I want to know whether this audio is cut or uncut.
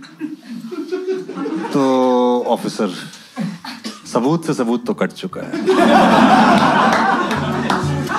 uncut